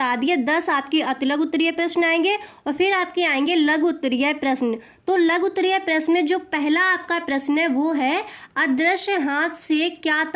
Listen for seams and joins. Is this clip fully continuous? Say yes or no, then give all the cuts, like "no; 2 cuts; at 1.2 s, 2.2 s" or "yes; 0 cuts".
yes; 0 cuts